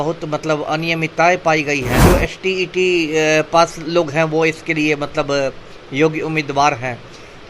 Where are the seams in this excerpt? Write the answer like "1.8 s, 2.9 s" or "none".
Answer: 2.0 s